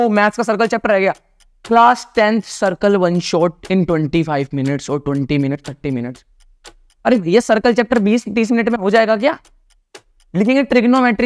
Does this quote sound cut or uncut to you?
uncut